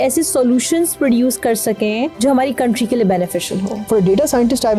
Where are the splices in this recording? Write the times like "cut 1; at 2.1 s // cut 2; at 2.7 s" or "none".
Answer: cut 1; at 2.1 s // cut 2; at 3.9 s